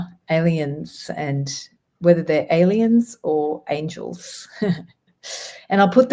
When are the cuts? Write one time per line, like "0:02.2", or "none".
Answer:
none